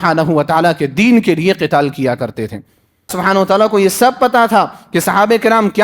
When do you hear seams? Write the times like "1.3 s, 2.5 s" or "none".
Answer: 3.2 s